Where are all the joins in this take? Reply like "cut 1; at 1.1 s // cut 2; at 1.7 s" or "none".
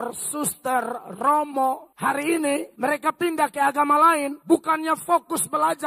cut 1; at 1.9 s // cut 2; at 2.7 s // cut 3; at 4.3 s